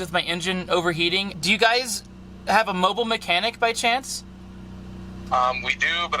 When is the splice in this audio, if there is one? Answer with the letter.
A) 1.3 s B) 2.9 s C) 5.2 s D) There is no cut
A